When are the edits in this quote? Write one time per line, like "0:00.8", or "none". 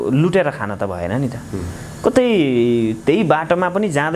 none